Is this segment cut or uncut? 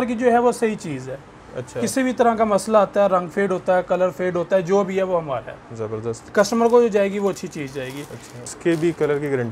cut